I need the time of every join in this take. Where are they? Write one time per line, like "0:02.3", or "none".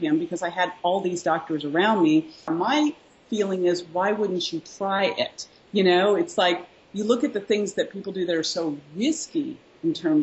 0:02.4